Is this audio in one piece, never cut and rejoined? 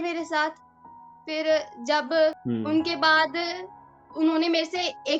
no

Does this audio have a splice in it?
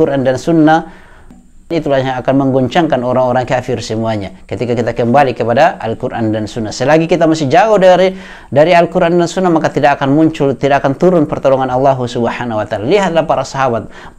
yes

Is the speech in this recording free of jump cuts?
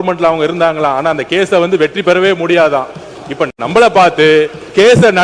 yes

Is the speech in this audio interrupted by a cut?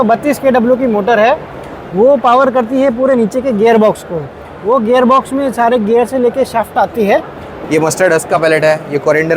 yes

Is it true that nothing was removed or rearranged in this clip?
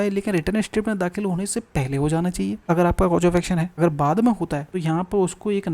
no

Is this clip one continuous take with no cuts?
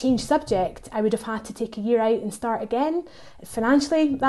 yes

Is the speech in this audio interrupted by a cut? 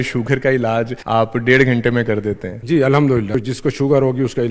yes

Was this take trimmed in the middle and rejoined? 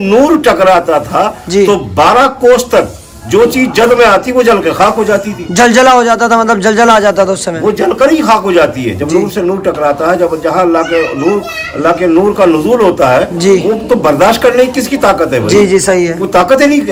no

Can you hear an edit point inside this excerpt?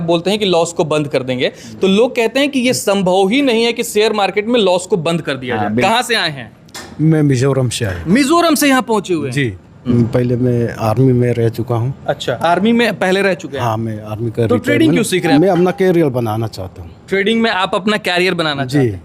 yes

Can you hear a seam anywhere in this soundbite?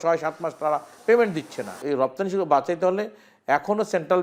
yes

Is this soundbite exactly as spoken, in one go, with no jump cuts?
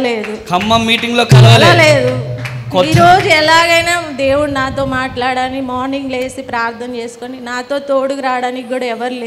yes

